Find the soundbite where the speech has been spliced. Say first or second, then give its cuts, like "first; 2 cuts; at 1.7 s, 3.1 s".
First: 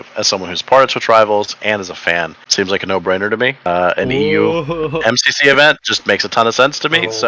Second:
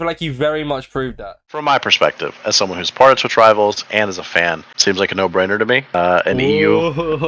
second; 1 cut; at 1.4 s